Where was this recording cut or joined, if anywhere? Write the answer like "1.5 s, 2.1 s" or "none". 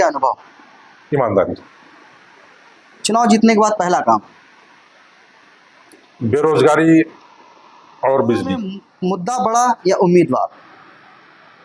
8.9 s